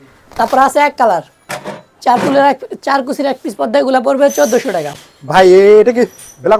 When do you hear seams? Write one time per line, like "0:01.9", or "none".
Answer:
none